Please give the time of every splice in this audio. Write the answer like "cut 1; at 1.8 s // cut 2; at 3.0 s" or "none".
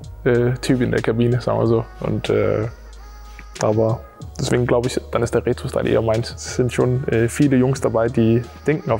none